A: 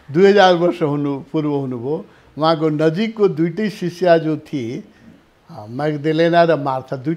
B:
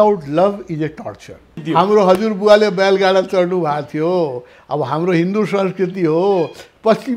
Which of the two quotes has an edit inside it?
B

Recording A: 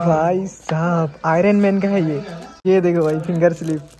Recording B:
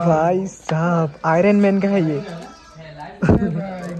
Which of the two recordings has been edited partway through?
A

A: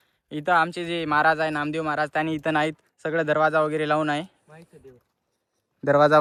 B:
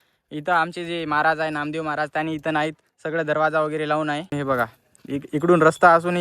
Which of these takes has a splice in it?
B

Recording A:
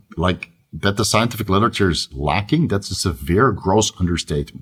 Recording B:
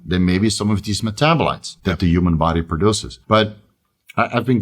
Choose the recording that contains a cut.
B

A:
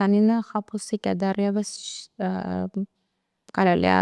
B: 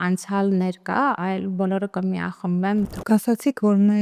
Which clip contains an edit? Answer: B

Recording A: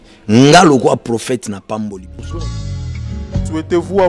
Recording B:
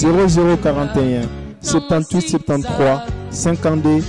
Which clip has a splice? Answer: A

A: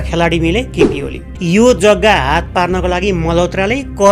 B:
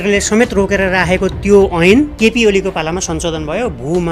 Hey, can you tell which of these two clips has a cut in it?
A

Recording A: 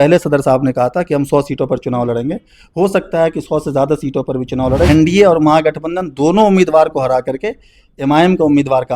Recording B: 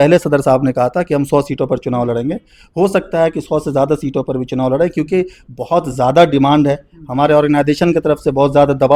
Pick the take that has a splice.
A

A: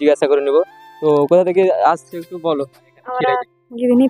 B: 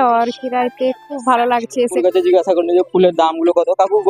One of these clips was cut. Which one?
B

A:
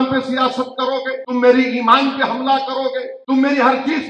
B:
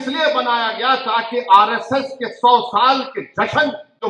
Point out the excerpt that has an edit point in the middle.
A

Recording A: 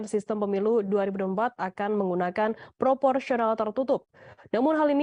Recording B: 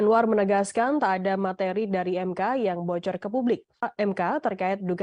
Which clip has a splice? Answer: B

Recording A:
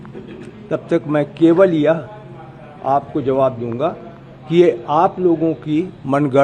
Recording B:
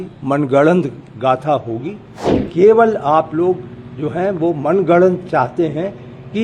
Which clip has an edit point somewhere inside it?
B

